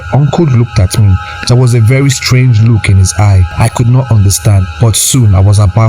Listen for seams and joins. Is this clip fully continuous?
no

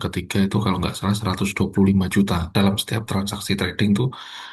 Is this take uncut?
no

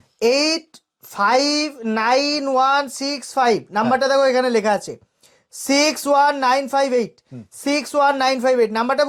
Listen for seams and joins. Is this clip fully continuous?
yes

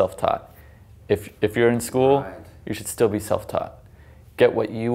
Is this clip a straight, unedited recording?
yes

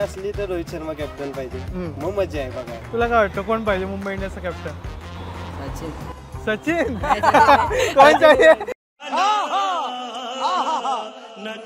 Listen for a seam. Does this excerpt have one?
no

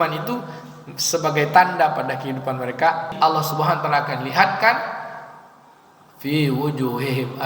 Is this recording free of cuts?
no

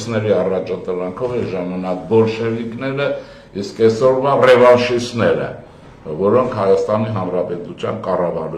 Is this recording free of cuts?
yes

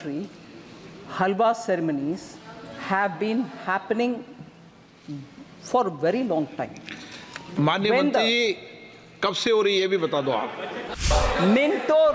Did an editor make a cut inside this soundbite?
yes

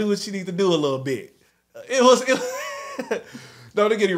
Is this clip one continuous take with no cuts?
yes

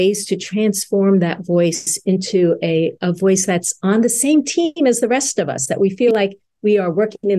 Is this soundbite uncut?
yes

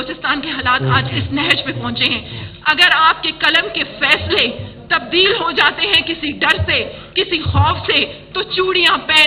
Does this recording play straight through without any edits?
yes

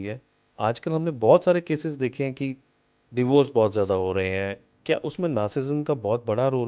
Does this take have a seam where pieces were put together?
no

